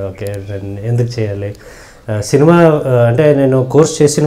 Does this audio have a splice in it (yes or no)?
no